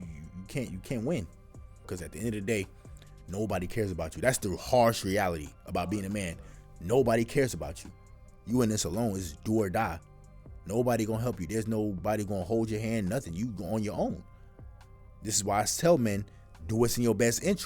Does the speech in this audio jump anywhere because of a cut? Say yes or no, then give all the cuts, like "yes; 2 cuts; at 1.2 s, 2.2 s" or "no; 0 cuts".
yes; 1 cut; at 1.9 s